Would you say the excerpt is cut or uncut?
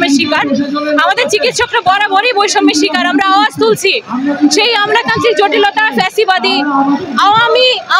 uncut